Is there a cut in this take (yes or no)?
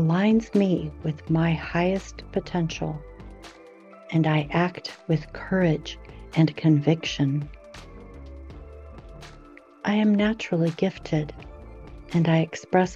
no